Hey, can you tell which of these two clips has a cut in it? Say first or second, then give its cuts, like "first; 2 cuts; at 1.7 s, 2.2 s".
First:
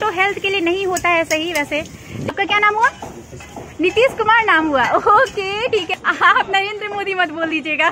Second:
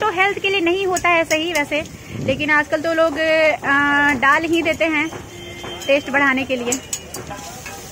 first; 2 cuts; at 2.3 s, 5.6 s